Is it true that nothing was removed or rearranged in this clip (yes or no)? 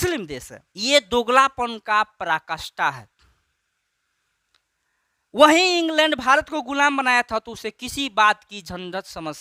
yes